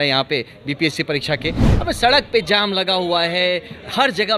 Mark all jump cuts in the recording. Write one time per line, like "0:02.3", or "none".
0:01.7